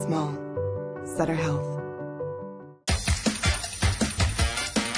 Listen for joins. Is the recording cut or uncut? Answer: uncut